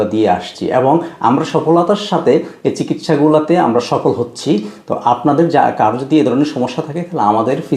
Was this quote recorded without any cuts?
yes; 0 cuts

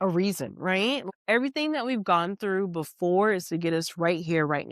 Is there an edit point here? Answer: yes; 1 cut; at 1.0 s

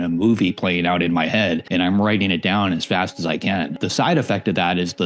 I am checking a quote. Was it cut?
yes; 2 cuts; at 1.6 s, 3.8 s

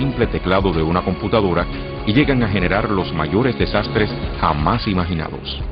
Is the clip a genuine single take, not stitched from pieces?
no; 1 cut; at 2.3 s

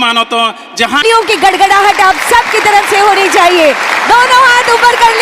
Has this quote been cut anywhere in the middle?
yes; 1 cut; at 1.0 s

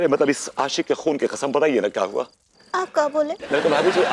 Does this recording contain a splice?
no; 0 cuts

